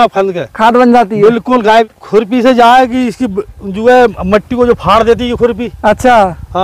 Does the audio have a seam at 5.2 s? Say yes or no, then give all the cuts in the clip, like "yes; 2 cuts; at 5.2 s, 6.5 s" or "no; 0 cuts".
no; 1 cut; at 1.9 s